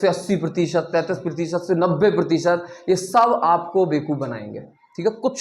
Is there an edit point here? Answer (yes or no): yes